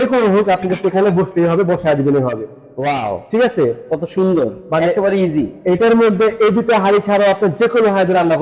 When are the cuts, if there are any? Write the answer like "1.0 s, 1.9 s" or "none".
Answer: none